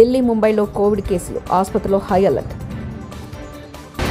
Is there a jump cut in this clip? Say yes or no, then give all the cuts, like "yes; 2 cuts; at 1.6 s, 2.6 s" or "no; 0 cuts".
no; 0 cuts